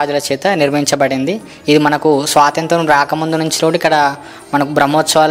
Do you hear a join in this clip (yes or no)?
no